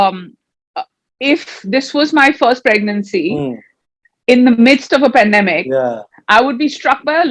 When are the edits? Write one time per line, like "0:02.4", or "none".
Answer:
none